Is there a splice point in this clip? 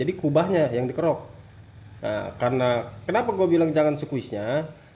no; 0 cuts

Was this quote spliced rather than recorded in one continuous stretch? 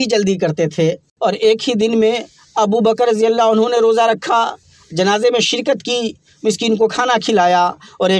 yes; 1 cut; at 1.1 s

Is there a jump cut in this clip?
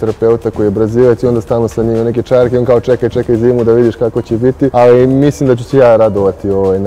yes; 1 cut; at 4.7 s

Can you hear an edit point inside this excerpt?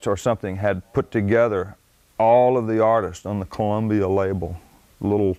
no; 0 cuts

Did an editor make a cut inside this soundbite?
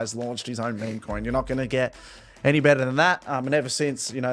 no; 0 cuts

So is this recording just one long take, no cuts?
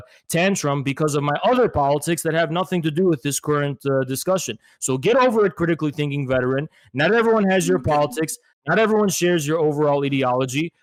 yes; 0 cuts

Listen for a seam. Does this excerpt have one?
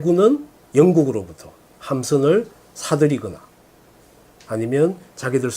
yes; 1 cut; at 3.3 s

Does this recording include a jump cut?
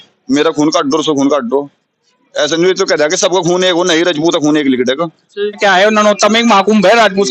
yes; 1 cut; at 5.6 s

